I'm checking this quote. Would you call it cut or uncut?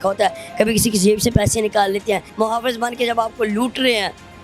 cut